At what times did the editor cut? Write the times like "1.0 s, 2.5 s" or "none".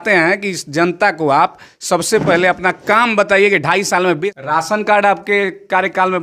4.2 s